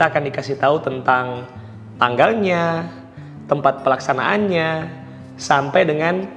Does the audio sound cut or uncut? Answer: uncut